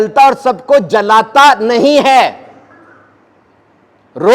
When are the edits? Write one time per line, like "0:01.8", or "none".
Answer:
none